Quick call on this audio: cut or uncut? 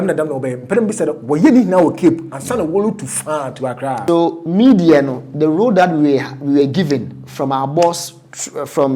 cut